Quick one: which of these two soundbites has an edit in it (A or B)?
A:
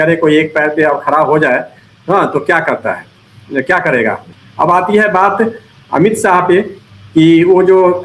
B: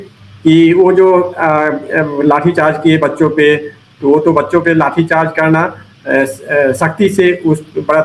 A